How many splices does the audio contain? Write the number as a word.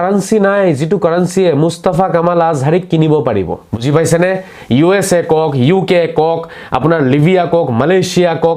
one